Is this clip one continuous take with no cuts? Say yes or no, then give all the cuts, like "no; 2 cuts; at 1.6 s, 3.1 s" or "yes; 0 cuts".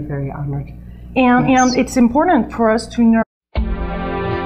yes; 0 cuts